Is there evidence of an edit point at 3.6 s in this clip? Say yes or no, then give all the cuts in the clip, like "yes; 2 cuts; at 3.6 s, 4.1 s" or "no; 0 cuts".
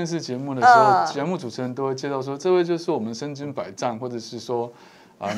no; 0 cuts